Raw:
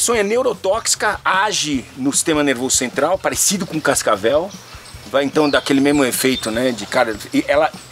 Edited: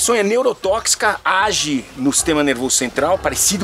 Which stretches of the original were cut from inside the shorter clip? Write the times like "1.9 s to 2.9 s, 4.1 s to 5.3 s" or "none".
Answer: none